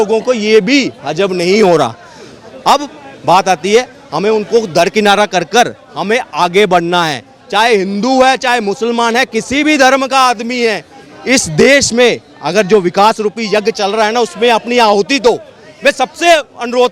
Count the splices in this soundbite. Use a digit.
0